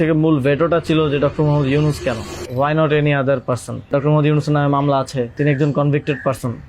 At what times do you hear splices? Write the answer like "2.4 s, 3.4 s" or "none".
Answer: 2.4 s, 3.9 s, 5.3 s

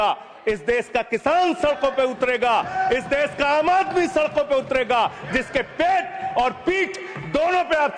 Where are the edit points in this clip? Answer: none

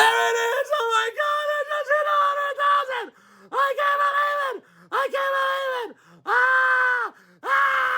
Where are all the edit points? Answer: none

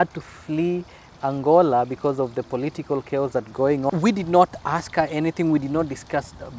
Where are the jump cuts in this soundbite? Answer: 3.9 s

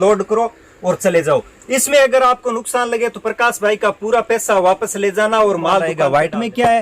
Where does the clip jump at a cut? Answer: 5.9 s

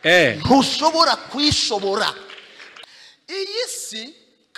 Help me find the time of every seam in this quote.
none

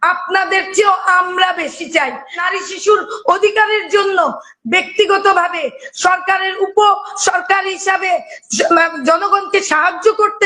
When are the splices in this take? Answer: 2.4 s

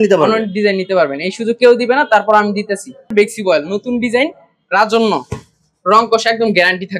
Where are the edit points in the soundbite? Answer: 3.1 s

